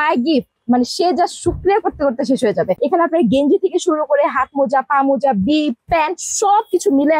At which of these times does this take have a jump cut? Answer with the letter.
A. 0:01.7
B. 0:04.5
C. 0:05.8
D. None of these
D